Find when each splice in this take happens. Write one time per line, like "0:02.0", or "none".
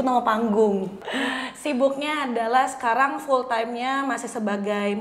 0:01.0